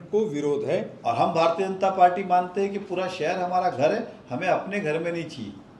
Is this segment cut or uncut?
cut